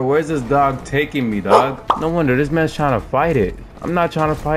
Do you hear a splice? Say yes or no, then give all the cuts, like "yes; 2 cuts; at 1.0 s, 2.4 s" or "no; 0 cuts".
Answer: yes; 1 cut; at 1.8 s